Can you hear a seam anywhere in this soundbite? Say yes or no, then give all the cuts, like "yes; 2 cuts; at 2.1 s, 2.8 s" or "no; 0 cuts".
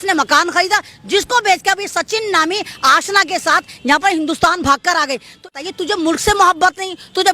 yes; 1 cut; at 5.5 s